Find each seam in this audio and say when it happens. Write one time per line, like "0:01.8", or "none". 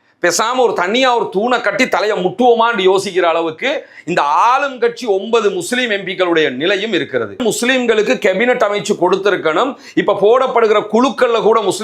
0:07.4